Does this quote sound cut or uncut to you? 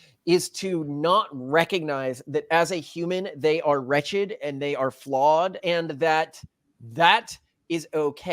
cut